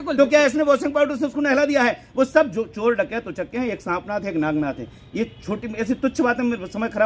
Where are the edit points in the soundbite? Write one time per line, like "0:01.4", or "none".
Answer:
none